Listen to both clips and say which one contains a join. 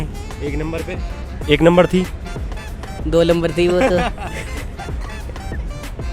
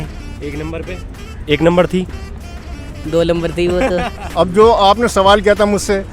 second; 1 cut; at 4.2 s

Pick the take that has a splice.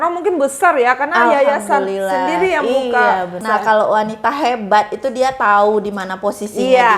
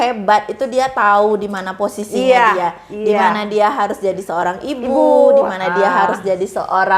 first; 1 cut; at 3.4 s

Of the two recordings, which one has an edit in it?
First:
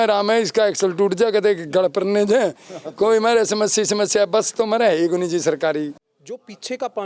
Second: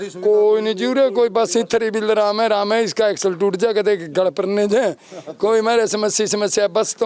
first; 1 cut; at 6.0 s

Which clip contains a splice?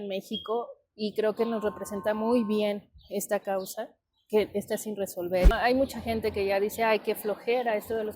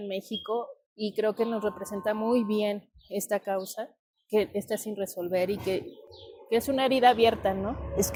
first; 1 cut; at 5.5 s

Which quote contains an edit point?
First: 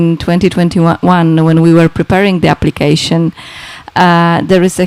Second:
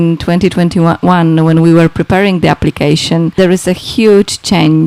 second; 1 cut; at 3.3 s

